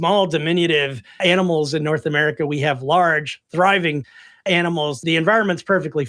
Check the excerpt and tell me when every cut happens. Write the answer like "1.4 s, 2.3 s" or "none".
1.2 s, 4.4 s